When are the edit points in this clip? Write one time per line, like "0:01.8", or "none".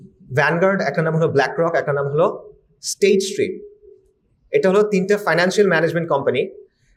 none